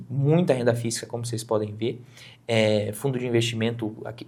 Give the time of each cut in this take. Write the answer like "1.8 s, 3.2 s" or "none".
none